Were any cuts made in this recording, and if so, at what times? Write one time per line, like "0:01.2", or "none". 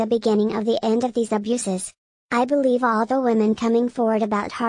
none